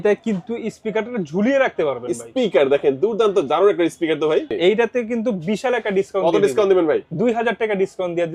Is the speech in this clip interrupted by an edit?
yes; 1 cut; at 4.6 s

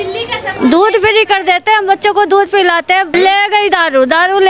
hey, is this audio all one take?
no; 1 cut; at 3.1 s

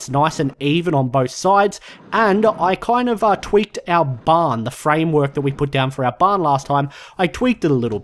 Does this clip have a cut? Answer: no; 0 cuts

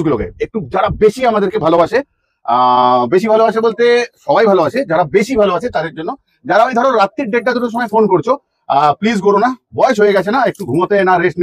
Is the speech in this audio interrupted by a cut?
no; 0 cuts

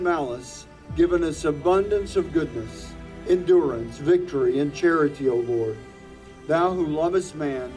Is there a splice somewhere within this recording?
no; 0 cuts

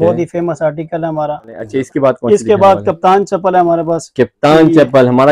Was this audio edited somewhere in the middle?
yes; 1 cut; at 1.6 s

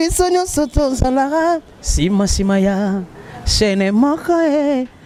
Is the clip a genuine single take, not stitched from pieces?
yes; 0 cuts

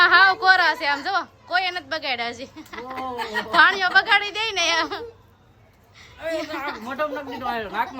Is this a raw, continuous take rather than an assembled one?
yes; 0 cuts

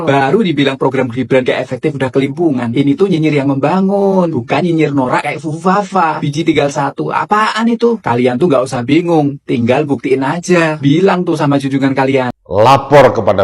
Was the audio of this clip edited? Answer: yes; 1 cut; at 12.3 s

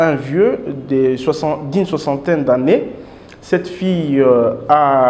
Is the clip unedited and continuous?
yes; 0 cuts

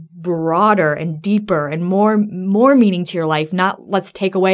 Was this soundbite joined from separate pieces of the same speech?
no; 0 cuts

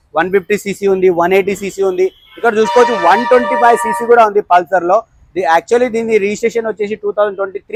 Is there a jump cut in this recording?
no; 0 cuts

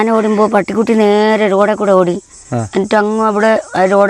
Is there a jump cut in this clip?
no; 0 cuts

